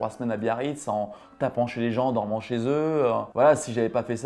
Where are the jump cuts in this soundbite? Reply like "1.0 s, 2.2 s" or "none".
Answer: 3.3 s

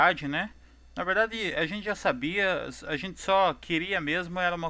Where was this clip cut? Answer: 2.3 s

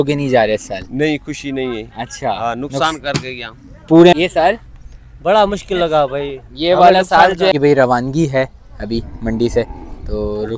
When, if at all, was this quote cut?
4.1 s, 7.5 s

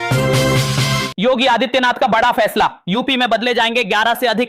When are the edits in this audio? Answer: 1.1 s

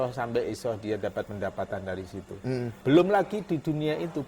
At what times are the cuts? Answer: 2.8 s

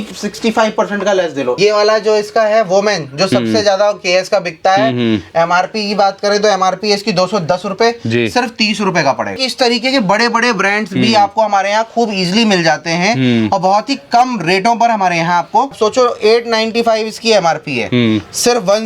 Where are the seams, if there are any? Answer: 1.6 s, 9.4 s, 15.8 s

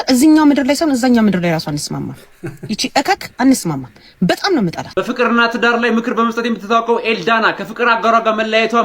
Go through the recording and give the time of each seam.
4.9 s

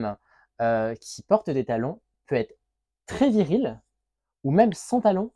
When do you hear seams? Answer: none

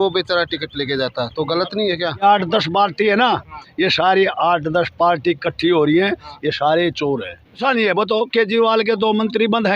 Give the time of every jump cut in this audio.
2.2 s, 7.6 s

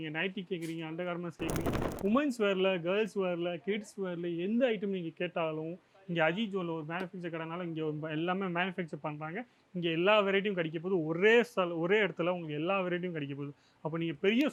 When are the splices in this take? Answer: none

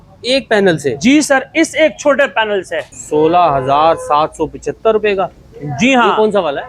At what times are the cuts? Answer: 2.9 s

